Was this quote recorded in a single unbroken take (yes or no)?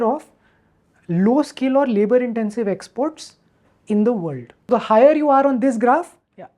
no